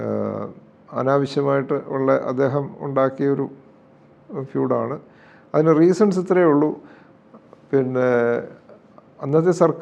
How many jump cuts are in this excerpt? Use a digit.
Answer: 0